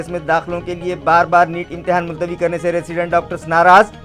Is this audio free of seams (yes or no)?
yes